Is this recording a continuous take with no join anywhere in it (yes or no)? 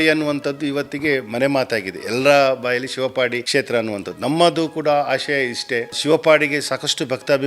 no